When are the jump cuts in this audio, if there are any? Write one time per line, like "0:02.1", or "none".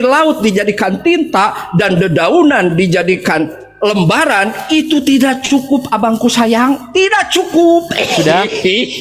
none

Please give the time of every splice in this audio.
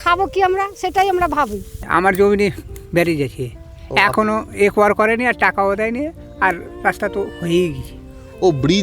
0:01.8

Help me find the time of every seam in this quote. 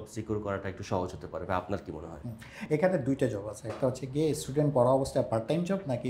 none

